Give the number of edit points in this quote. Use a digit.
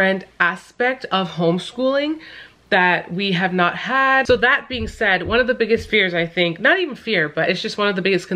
1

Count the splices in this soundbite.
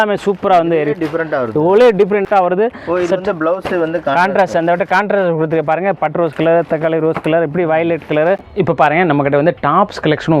2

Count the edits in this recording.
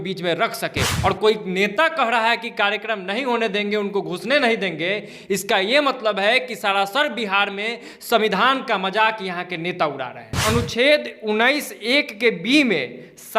2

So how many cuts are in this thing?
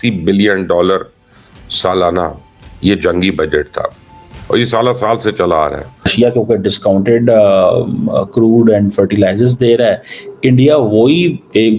1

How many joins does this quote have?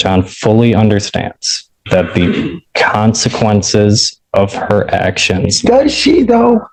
0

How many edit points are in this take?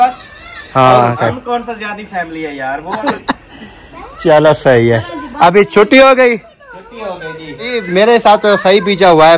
3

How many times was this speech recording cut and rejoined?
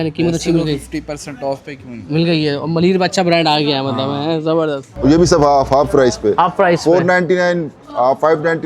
0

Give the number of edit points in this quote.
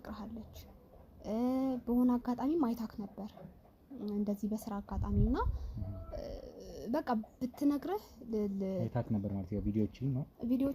0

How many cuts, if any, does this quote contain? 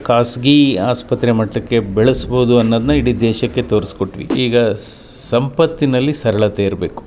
1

